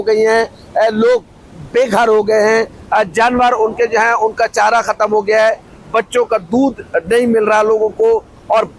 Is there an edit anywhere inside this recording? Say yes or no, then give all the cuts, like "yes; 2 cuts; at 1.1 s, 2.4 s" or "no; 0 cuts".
no; 0 cuts